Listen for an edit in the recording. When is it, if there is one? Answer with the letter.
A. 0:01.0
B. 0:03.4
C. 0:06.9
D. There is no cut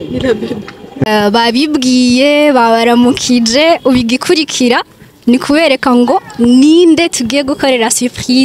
A